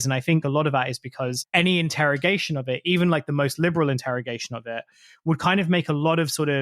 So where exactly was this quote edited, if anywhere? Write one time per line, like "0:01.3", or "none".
0:01.4